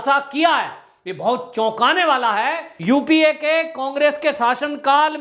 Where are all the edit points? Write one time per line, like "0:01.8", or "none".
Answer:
0:02.7